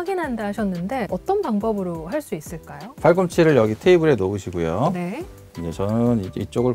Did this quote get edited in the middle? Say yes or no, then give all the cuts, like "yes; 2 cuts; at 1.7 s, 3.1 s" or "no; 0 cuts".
yes; 2 cuts; at 1.1 s, 2.8 s